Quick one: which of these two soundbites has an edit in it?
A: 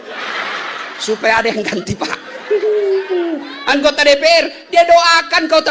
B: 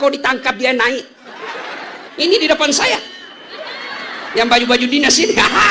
B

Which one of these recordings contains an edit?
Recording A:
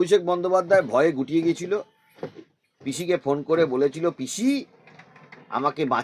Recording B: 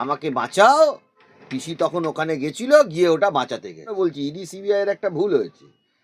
B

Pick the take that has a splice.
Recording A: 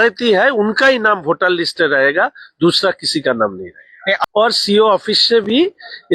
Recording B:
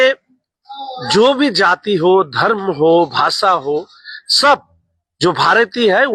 A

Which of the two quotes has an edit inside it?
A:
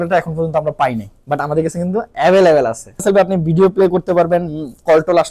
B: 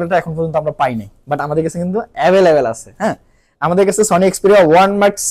A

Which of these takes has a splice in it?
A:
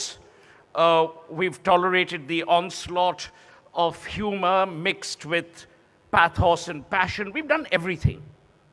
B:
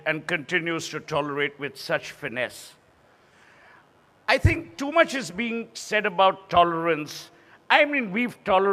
B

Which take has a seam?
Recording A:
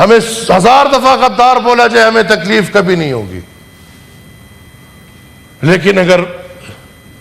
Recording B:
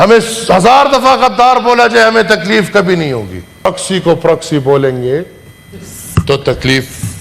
B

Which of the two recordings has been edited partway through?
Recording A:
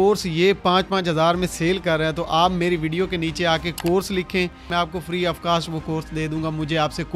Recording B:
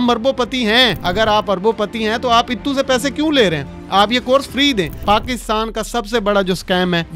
B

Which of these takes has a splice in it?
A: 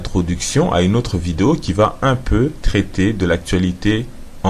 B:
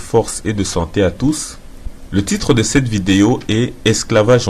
A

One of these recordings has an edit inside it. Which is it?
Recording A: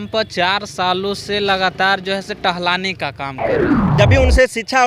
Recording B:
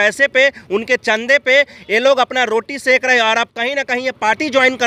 A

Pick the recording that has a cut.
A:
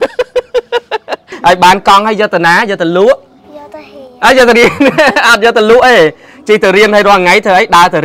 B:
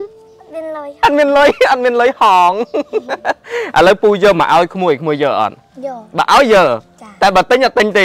A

